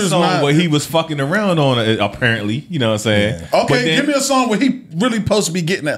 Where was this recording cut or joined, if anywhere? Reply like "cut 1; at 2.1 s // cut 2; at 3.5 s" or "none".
none